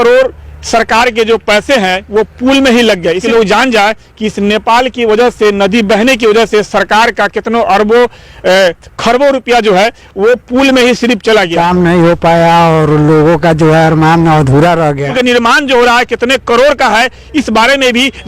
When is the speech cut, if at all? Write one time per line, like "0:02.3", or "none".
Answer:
0:03.2
0:11.5
0:15.1